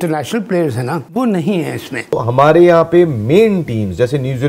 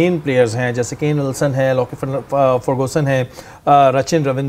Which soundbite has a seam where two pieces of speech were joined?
first; 1 cut; at 2.2 s

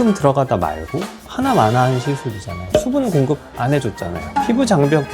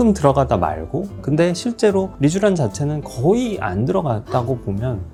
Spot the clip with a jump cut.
first; 2 cuts; at 1.1 s, 2.6 s

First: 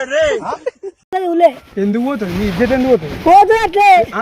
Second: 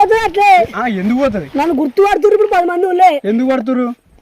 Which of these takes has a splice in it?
first; 1 cut; at 1.2 s

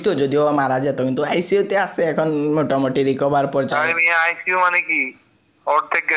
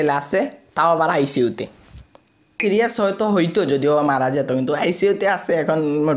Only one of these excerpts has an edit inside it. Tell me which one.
second; 1 cut; at 2.6 s

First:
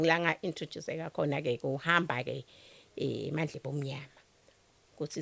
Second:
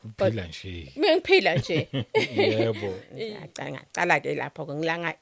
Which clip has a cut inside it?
second; 1 cut; at 3.1 s

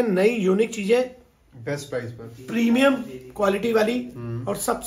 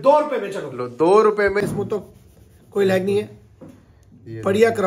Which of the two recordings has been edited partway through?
second; 1 cut; at 1.6 s

